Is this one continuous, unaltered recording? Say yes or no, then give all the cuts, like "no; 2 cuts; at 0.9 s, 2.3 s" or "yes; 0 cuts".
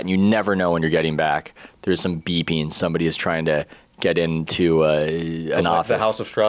yes; 0 cuts